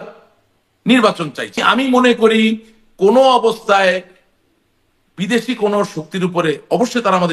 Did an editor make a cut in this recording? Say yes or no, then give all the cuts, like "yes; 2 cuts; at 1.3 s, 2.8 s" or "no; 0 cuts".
yes; 1 cut; at 1.6 s